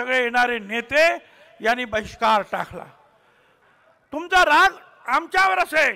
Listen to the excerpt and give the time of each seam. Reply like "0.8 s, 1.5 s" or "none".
3.5 s